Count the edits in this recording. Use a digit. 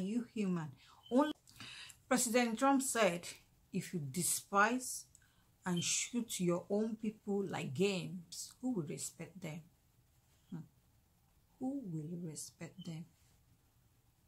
1